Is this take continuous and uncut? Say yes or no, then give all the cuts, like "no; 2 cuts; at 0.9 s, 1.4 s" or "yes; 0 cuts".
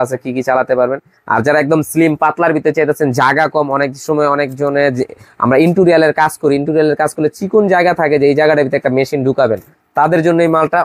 yes; 0 cuts